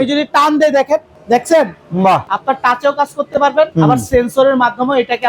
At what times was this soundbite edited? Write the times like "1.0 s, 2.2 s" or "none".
1.1 s, 2.3 s, 3.7 s